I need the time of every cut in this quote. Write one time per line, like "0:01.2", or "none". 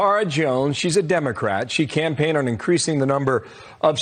none

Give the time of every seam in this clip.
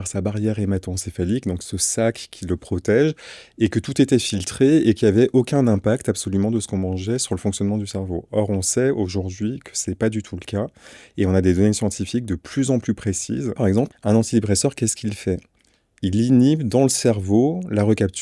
0:13.7

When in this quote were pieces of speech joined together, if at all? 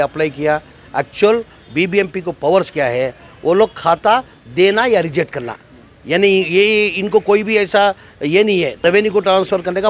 0:08.8

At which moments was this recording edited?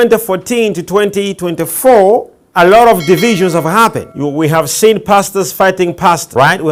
none

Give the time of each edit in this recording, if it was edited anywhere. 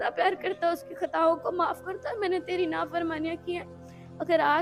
none

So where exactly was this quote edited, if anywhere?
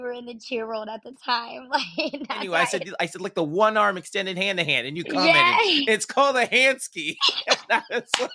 0:02.5

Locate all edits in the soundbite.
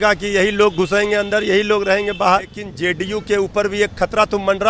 0:02.6

